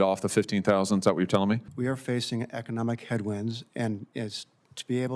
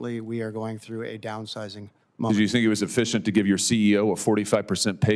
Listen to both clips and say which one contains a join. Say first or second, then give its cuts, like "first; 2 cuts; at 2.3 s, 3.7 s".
first; 1 cut; at 1.7 s